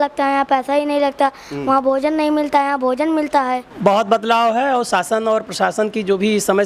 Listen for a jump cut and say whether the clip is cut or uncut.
cut